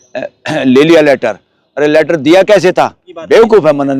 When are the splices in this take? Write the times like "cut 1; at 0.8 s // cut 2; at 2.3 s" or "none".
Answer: cut 1; at 3.1 s